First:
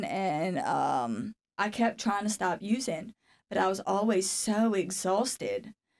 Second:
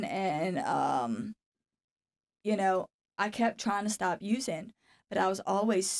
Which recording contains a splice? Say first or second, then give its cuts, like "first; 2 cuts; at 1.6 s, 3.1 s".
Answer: first; 1 cut; at 1.4 s